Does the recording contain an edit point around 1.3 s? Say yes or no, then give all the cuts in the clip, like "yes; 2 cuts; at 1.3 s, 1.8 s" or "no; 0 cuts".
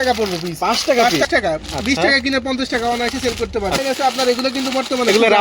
yes; 2 cuts; at 1.3 s, 3.8 s